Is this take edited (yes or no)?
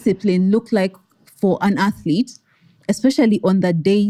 no